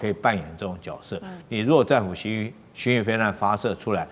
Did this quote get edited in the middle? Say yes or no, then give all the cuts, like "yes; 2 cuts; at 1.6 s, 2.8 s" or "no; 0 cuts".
no; 0 cuts